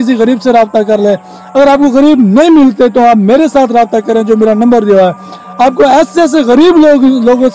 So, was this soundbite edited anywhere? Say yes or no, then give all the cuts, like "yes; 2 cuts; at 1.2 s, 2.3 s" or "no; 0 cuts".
no; 0 cuts